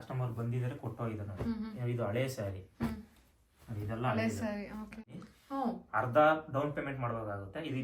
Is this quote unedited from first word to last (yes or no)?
no